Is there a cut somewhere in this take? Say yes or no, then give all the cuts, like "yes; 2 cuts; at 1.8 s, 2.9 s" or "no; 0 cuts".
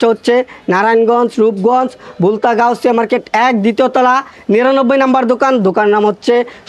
no; 0 cuts